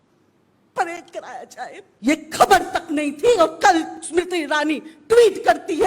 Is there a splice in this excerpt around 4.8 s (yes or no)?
no